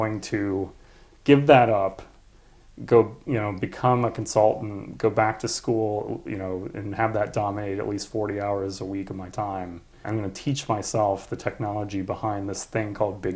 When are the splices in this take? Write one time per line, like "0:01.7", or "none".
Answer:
0:10.1